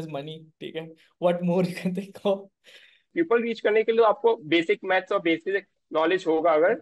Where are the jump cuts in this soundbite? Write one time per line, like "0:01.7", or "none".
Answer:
0:03.0